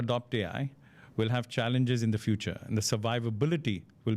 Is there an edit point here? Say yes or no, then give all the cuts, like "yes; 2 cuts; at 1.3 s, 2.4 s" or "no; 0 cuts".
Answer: no; 0 cuts